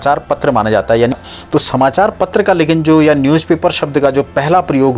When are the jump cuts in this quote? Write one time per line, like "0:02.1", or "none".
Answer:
0:01.1